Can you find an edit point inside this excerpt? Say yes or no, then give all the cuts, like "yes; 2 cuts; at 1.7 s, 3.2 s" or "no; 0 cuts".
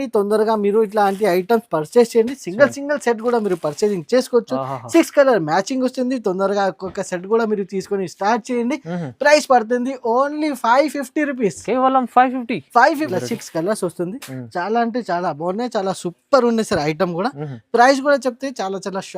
yes; 1 cut; at 13.1 s